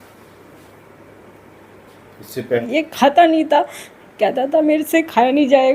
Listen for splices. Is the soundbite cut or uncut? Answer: cut